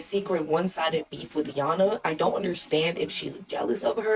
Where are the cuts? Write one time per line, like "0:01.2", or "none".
none